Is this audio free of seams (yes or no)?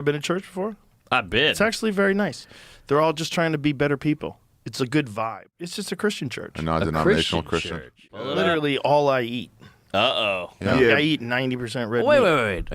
no